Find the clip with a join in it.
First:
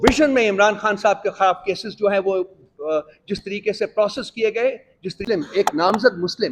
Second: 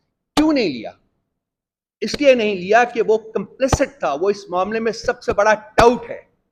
first; 1 cut; at 5.2 s

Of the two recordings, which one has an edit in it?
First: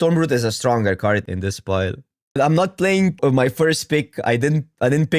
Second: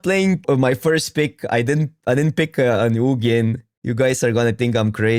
first; 1 cut; at 1.7 s

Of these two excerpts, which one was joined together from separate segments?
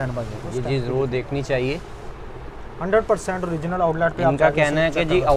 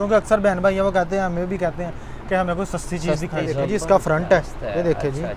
second; 1 cut; at 3.5 s

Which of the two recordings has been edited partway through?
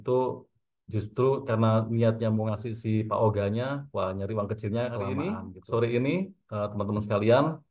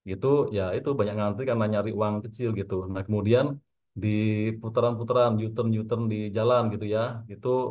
first; 1 cut; at 5.2 s

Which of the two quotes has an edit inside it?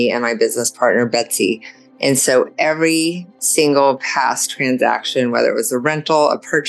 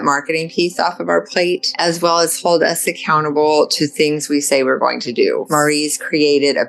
second; 2 cuts; at 1.7 s, 5.4 s

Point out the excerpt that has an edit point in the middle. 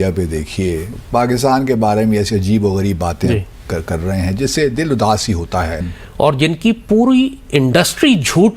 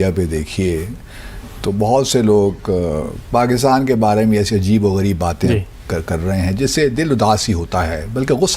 first; 2 cuts; at 0.9 s, 5.9 s

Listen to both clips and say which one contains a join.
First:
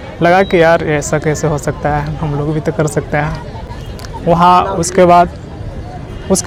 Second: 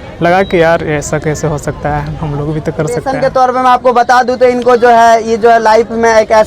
second; 1 cut; at 3.1 s

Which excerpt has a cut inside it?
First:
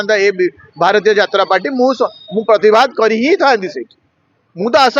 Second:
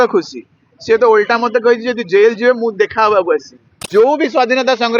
second; 1 cut; at 3.8 s

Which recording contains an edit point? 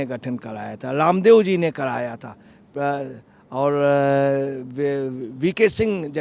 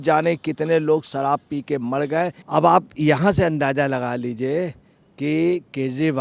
second; 1 cut; at 2.4 s

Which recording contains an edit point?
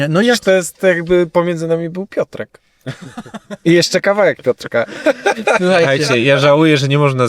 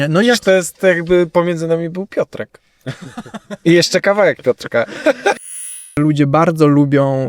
second; 1 cut; at 5.4 s

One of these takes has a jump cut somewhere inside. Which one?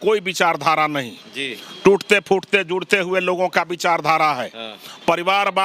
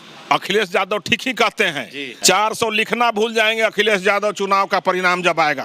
second; 1 cut; at 2.1 s

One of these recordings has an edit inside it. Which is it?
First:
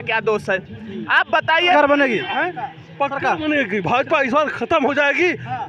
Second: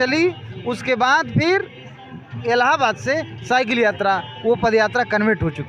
first; 1 cut; at 1.7 s

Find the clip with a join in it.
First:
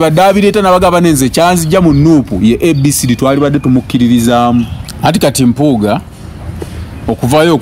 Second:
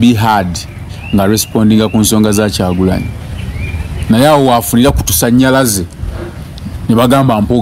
first; 1 cut; at 4.8 s

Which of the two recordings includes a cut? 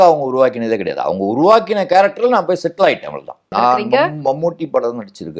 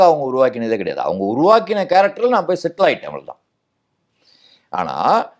first; 1 cut; at 3.5 s

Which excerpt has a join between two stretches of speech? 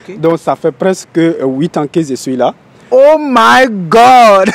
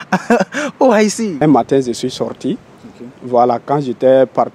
second; 1 cut; at 1.4 s

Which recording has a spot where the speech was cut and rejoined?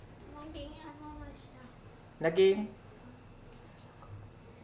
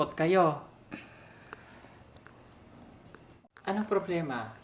second; 1 cut; at 3.4 s

